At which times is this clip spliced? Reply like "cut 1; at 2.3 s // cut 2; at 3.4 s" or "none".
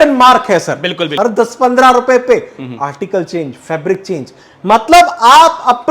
cut 1; at 1.1 s